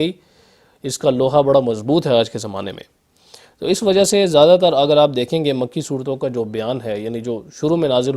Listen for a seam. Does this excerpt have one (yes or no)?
no